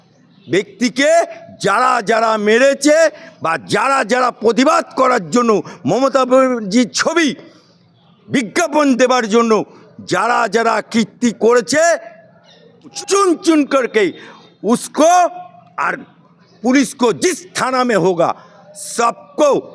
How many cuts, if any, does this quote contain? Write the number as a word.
one